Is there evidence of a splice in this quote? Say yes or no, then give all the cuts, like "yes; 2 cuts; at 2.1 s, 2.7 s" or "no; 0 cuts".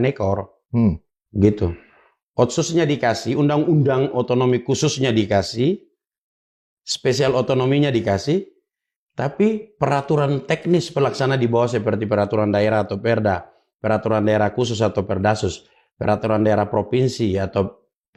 no; 0 cuts